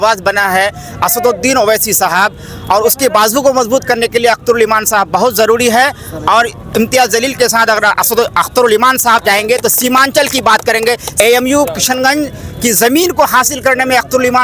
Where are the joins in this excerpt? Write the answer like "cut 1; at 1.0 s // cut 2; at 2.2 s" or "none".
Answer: cut 1; at 11.1 s